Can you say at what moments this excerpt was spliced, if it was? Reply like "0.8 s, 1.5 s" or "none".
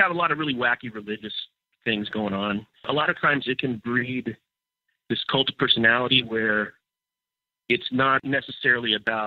2.7 s, 8.2 s